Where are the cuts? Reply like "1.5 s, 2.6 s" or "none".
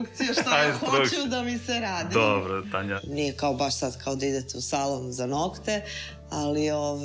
3.0 s